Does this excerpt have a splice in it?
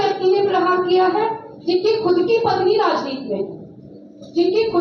no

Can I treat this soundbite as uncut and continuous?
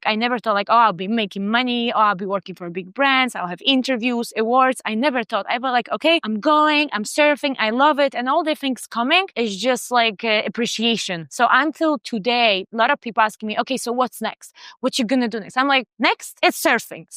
yes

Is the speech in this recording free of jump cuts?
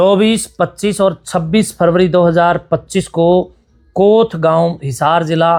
yes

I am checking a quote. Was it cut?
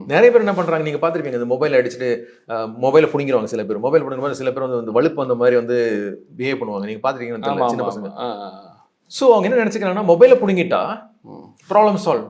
no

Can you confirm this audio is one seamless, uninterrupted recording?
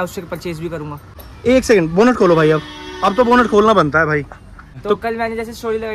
no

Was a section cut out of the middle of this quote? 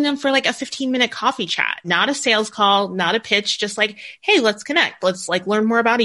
no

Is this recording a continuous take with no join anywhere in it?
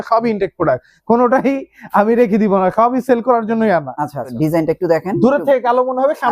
no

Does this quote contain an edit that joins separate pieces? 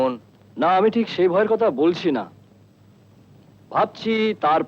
no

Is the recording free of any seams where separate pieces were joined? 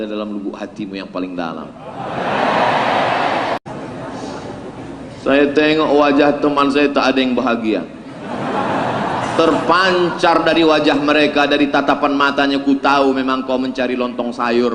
no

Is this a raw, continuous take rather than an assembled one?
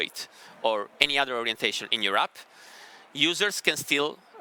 yes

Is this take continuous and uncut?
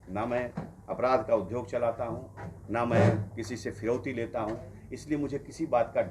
yes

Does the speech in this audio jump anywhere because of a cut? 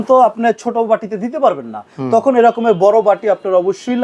no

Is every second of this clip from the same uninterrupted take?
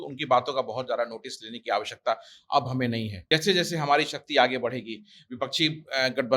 no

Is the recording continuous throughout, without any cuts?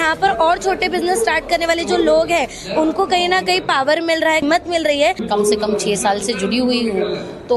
no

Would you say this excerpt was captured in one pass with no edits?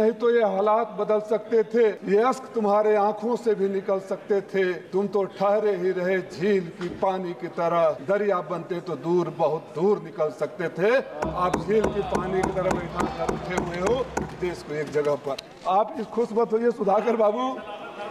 no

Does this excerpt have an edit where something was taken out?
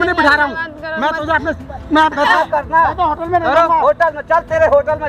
yes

